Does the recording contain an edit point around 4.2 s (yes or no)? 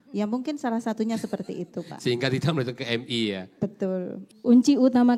yes